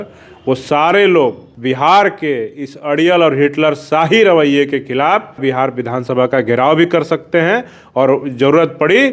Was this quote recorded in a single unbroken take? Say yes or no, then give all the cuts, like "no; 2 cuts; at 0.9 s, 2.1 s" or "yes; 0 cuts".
no; 2 cuts; at 1.5 s, 5.4 s